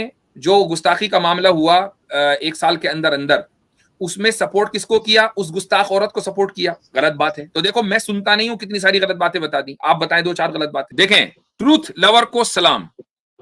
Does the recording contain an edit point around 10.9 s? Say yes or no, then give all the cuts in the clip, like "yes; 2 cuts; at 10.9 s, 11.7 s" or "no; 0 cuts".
yes; 1 cut; at 10.9 s